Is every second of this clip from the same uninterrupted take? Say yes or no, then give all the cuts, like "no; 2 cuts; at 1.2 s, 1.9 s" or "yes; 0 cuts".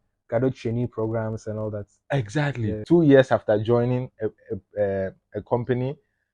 no; 1 cut; at 2.8 s